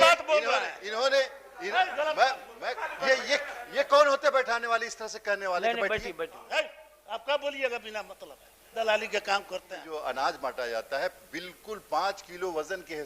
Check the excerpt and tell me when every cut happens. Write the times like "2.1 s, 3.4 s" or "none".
2.5 s, 6.4 s, 9.8 s